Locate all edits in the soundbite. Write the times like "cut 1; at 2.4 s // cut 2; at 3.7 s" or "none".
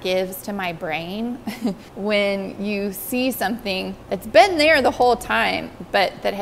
cut 1; at 1.9 s // cut 2; at 4.0 s